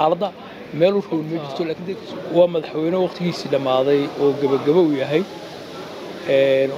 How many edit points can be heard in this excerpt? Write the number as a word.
one